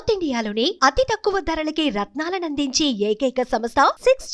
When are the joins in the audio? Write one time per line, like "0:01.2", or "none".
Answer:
none